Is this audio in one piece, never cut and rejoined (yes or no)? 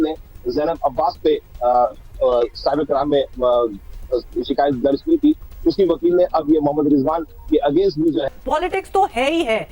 yes